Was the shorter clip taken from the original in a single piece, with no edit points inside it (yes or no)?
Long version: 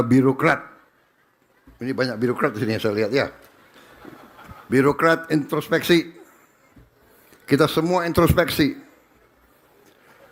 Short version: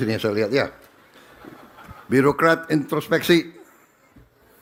yes